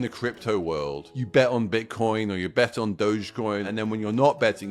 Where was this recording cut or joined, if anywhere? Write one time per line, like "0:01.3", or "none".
0:01.1
0:03.7

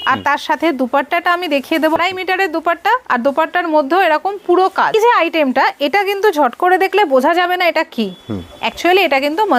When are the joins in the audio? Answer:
0:02.0
0:04.9

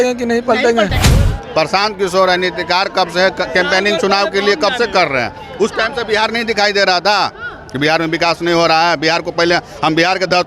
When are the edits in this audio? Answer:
0:01.1

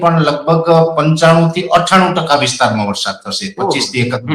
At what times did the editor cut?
none

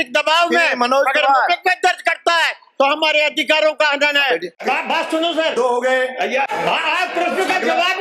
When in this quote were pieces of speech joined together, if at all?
0:04.6
0:06.5

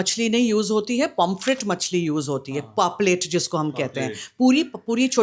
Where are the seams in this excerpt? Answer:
none

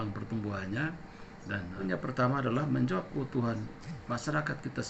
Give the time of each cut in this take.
0:01.8

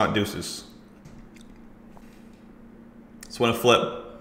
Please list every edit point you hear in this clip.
0:01.0
0:02.0

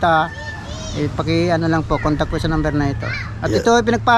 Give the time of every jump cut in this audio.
none

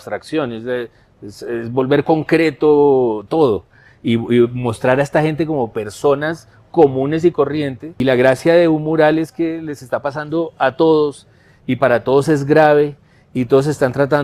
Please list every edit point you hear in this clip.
0:08.0

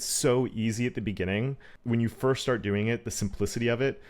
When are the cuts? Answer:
0:01.7

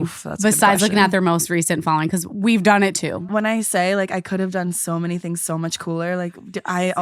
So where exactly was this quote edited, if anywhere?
0:03.3

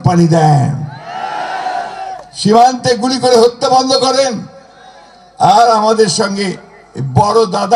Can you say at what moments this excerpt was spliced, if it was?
none

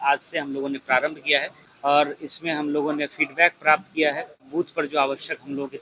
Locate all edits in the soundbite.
0:01.6
0:04.5

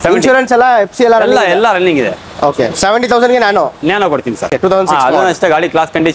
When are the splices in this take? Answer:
0:04.5

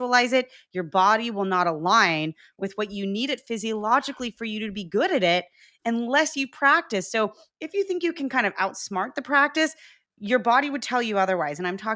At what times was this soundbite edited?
none

